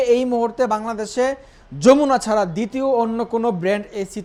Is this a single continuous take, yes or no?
yes